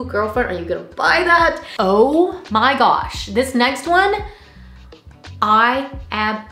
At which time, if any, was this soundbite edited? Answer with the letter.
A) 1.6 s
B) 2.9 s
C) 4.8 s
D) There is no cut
A